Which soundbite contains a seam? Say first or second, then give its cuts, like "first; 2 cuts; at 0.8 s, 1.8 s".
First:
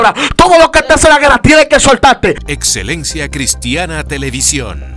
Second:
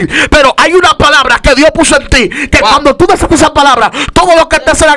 first; 1 cut; at 2.5 s